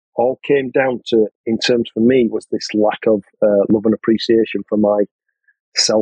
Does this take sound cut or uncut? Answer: uncut